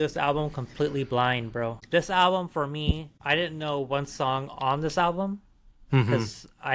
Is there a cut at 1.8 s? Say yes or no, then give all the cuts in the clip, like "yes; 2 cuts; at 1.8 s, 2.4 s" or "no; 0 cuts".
yes; 2 cuts; at 1.8 s, 3.1 s